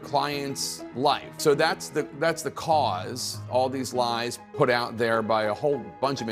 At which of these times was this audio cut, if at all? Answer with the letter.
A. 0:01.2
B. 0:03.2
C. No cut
A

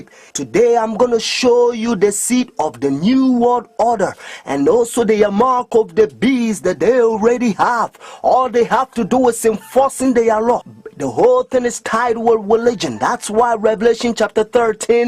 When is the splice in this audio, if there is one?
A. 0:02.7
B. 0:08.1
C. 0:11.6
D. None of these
C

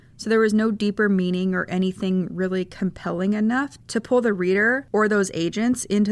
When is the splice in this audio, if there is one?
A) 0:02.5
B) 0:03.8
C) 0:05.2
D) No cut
B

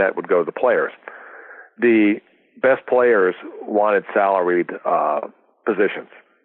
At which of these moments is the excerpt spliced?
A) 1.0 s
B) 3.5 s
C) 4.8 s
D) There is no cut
D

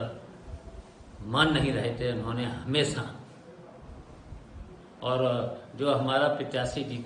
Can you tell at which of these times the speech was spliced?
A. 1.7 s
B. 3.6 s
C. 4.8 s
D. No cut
D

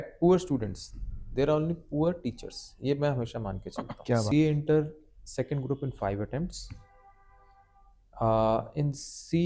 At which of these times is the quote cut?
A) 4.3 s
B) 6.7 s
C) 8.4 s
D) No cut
A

